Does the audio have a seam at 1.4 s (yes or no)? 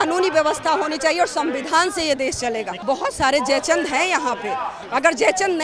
no